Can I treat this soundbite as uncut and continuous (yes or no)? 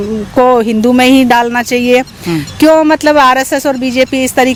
yes